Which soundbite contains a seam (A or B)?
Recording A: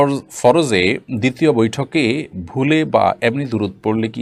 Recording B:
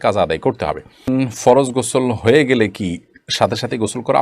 B